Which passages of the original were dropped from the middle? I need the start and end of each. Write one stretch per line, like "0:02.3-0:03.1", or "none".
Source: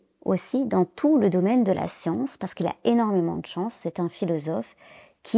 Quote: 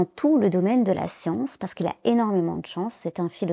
none